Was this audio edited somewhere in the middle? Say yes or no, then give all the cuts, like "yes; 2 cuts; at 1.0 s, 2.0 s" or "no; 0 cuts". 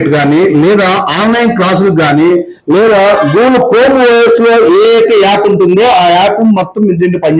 no; 0 cuts